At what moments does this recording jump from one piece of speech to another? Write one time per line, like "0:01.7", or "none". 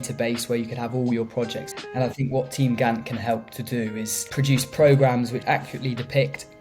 0:01.6
0:04.2
0:05.4